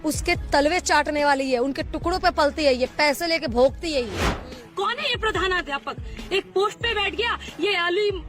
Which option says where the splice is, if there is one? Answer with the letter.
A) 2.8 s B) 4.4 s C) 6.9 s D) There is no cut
B